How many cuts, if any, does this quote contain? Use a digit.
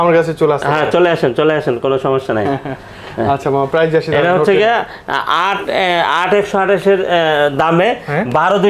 0